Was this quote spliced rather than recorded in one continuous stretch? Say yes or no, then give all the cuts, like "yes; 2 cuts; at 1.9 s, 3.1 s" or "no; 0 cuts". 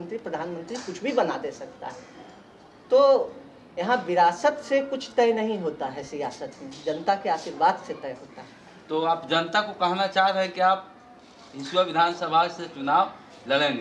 no; 0 cuts